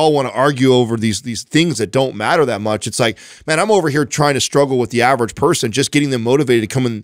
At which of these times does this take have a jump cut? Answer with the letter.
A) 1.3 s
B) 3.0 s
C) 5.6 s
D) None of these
D